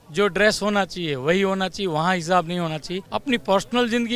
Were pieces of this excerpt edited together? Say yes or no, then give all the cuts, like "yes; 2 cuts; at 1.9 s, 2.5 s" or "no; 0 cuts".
yes; 1 cut; at 3.0 s